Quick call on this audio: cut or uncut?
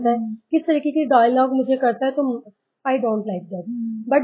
uncut